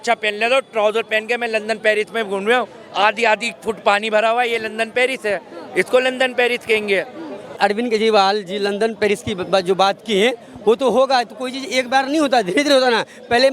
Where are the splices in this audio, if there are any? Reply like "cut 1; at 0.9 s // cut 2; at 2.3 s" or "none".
cut 1; at 7.4 s

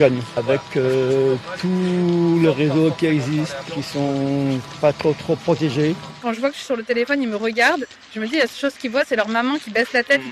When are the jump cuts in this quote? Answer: cut 1; at 3.7 s // cut 2; at 6.2 s

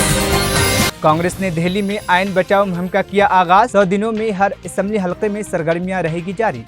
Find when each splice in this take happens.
cut 1; at 0.9 s

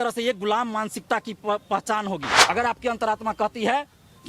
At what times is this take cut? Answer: cut 1; at 2.3 s

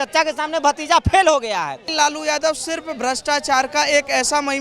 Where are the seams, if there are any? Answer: cut 1; at 1.9 s

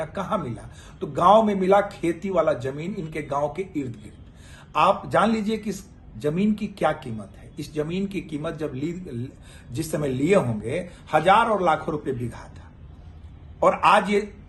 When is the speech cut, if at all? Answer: none

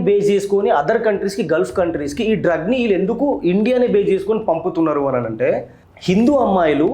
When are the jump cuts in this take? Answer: cut 1; at 5.8 s

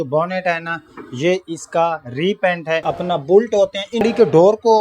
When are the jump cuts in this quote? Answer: cut 1; at 2.9 s // cut 2; at 4.0 s

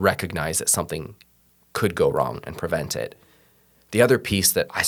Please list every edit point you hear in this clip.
none

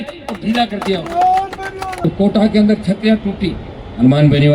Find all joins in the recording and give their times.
cut 1; at 2.0 s

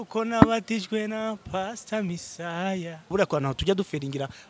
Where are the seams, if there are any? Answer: cut 1; at 3.1 s

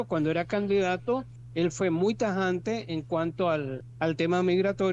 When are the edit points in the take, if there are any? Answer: cut 1; at 1.4 s // cut 2; at 3.8 s

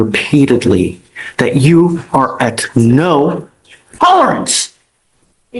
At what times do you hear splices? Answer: none

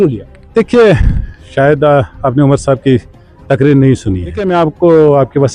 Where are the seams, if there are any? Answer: cut 1; at 4.4 s

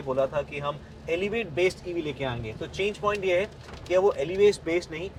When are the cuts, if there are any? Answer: none

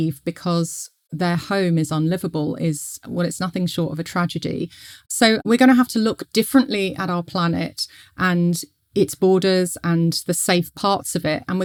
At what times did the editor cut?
none

